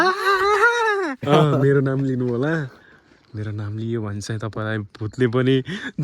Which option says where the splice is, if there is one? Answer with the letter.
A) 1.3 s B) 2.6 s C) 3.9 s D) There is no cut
A